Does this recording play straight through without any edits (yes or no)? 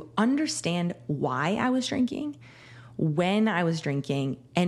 yes